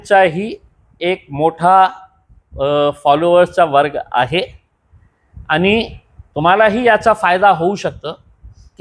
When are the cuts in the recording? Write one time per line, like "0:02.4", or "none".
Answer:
none